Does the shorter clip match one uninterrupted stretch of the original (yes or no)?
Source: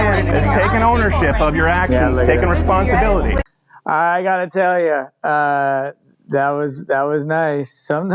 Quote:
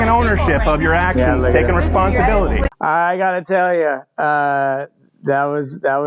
no